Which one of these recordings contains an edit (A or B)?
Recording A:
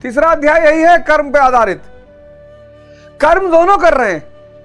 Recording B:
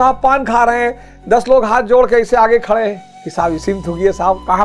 A